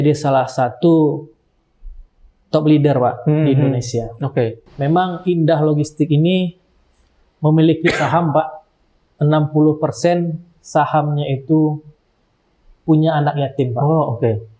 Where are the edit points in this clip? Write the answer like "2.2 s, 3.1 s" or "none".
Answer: 4.7 s

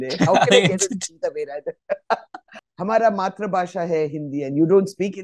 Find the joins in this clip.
2.6 s

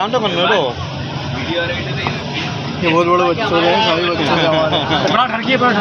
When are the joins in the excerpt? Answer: none

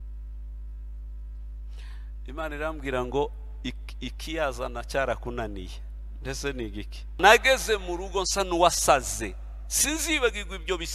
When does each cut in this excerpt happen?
7.2 s

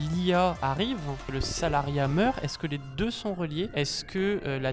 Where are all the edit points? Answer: 0.8 s, 3.7 s

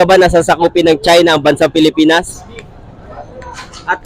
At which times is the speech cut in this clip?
none

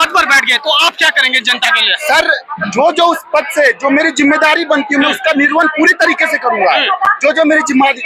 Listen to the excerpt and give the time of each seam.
none

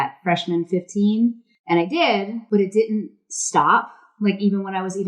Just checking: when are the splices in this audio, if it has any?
1.5 s, 2.4 s

